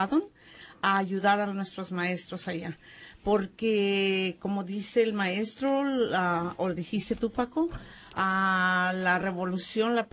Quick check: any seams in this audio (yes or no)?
yes